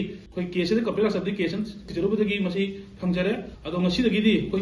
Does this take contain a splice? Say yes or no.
yes